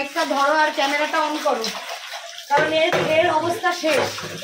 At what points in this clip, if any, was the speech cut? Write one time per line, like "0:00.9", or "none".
none